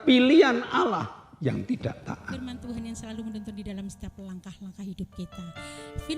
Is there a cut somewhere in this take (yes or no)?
yes